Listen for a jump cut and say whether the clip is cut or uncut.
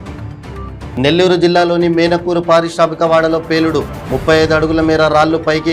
cut